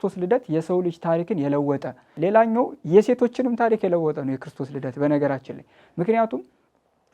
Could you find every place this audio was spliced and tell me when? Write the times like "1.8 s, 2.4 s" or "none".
2.1 s